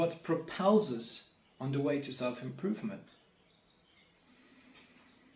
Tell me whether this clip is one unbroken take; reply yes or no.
yes